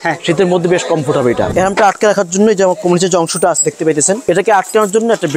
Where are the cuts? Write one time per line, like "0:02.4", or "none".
0:01.5
0:04.2